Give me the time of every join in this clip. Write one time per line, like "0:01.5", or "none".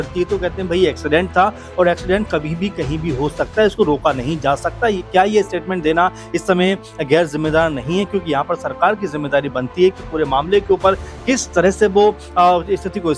none